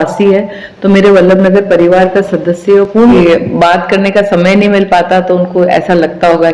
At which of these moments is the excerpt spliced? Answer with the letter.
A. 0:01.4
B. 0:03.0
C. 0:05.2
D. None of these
B